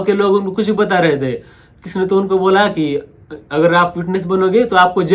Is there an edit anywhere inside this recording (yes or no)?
no